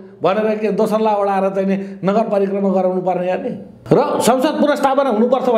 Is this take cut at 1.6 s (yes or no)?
no